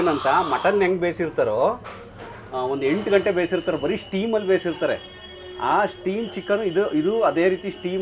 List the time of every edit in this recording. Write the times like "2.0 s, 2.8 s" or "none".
none